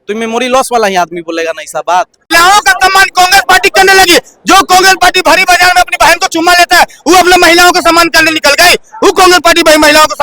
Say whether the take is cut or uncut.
cut